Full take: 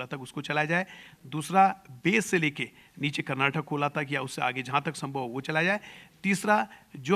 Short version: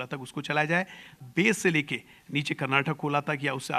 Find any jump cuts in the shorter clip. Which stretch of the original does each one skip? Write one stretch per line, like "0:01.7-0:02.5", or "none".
0:01.2-0:01.9